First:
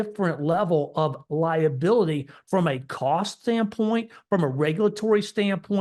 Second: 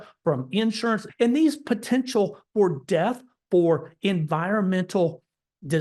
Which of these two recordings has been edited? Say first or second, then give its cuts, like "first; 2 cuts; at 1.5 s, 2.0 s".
second; 1 cut; at 1.1 s